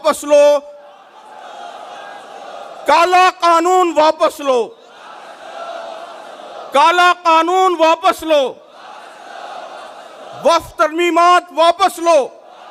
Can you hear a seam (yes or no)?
no